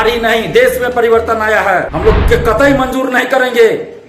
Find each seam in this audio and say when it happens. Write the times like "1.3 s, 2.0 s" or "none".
1.9 s